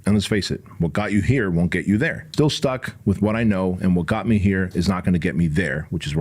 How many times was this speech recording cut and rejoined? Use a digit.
1